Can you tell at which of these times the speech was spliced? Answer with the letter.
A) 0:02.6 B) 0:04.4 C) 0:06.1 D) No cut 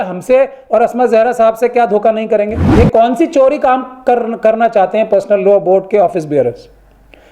A